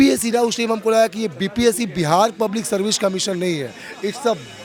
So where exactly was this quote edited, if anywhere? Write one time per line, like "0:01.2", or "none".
none